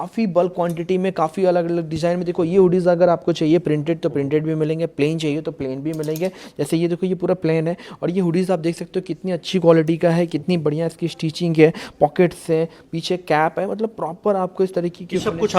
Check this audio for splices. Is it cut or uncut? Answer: uncut